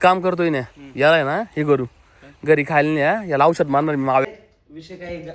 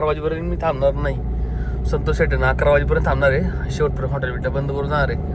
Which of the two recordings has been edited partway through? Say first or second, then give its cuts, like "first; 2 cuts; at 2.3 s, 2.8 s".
first; 1 cut; at 4.2 s